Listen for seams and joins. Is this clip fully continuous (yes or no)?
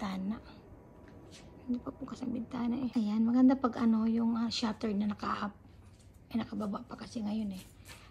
no